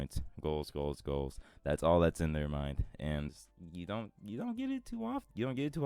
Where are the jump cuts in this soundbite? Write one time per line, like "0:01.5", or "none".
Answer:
0:03.3